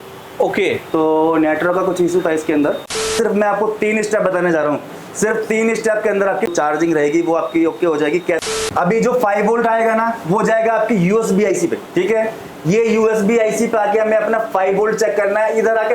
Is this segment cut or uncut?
cut